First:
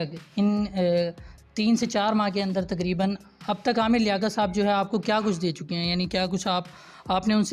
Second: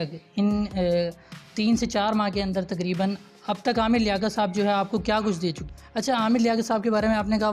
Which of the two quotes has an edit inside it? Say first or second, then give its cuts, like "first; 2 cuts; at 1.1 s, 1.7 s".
second; 1 cut; at 5.7 s